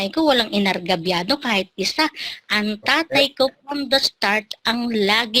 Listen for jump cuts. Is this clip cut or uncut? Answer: uncut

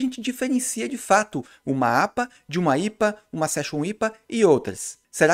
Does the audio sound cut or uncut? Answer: uncut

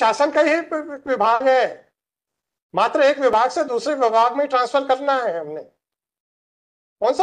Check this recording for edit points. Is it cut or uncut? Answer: uncut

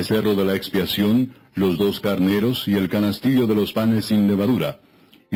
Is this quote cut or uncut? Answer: uncut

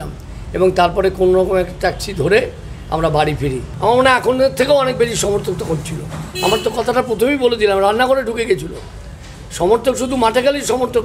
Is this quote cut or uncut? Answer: cut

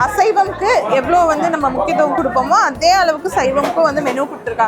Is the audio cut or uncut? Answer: uncut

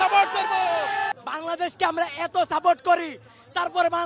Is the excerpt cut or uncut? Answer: cut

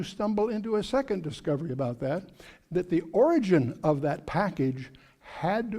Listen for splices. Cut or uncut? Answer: cut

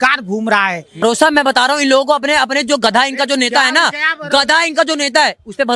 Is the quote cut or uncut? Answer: cut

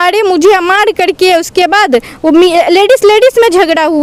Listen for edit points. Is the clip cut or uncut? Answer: uncut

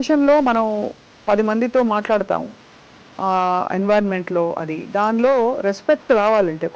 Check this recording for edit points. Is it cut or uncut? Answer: uncut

